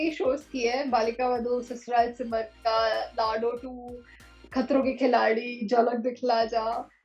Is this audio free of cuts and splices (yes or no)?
yes